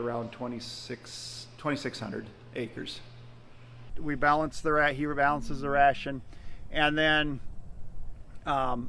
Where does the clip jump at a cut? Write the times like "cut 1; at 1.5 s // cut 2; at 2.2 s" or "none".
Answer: cut 1; at 3.9 s